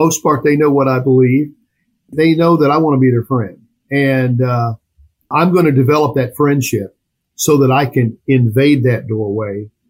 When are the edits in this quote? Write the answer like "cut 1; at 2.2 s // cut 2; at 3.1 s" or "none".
cut 1; at 2.1 s